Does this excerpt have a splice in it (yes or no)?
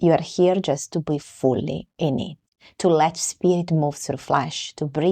no